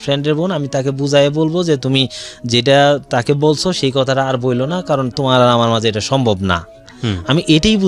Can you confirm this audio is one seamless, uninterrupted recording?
yes; 0 cuts

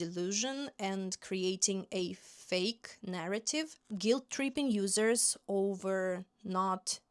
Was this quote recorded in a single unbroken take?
yes; 0 cuts

